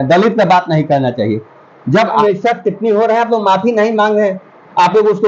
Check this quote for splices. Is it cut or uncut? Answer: cut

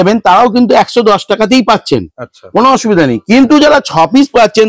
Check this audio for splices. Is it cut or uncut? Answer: uncut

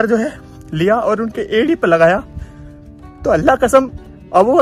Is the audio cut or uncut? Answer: uncut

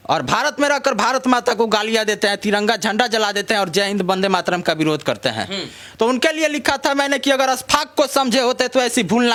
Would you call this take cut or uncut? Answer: uncut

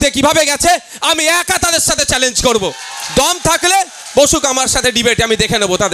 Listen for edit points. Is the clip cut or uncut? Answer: uncut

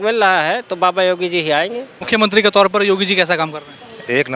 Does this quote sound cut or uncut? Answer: cut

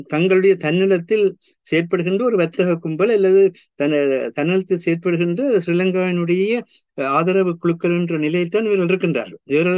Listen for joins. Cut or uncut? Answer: uncut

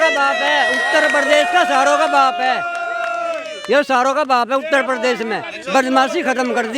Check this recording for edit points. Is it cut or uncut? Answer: uncut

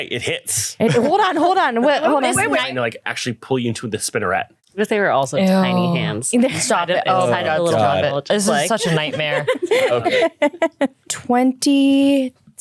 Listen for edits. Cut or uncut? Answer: cut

